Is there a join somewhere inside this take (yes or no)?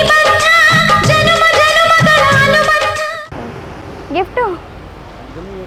no